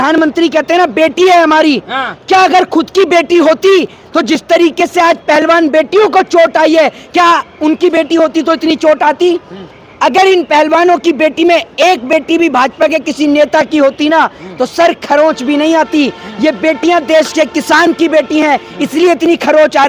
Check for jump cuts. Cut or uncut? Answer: uncut